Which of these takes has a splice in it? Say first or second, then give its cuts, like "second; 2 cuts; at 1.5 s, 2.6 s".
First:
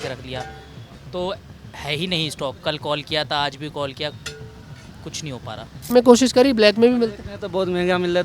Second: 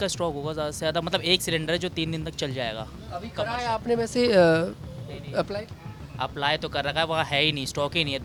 first; 1 cut; at 5.9 s